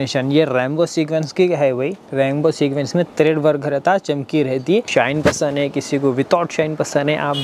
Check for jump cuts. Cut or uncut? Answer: cut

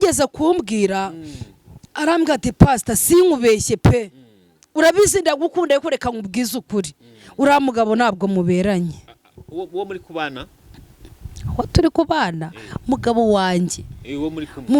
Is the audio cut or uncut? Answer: uncut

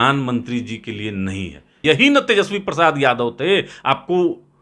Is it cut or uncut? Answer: cut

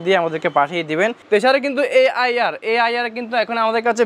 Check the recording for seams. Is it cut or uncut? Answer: cut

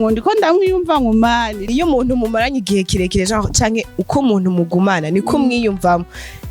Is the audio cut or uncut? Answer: cut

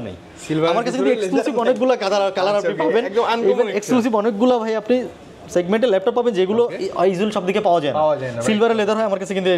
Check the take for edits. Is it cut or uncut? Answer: uncut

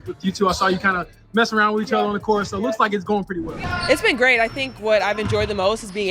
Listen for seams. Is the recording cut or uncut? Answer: cut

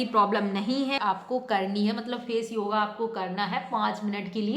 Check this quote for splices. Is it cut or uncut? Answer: cut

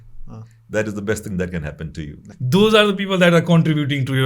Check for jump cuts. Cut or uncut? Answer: cut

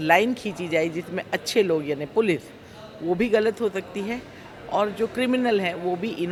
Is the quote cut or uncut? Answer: uncut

